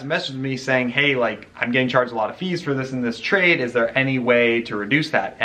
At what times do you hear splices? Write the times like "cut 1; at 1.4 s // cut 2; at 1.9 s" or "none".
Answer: none

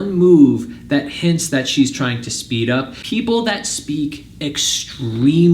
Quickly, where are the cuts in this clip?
cut 1; at 3.0 s

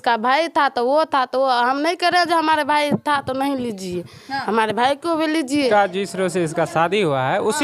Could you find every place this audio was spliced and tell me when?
cut 1; at 5.7 s

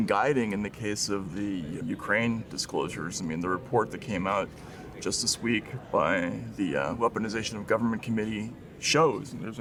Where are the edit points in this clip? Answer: none

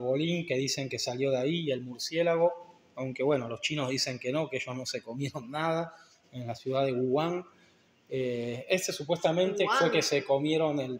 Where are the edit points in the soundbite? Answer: none

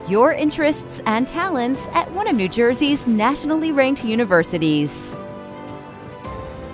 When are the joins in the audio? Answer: cut 1; at 4.9 s

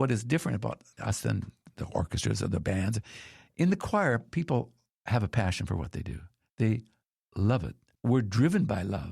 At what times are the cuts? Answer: cut 1; at 0.9 s // cut 2; at 7.8 s

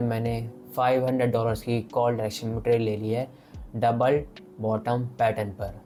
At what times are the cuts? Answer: none

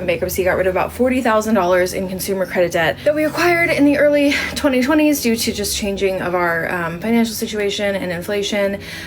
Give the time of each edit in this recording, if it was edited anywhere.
none

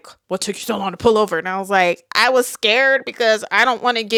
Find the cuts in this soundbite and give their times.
none

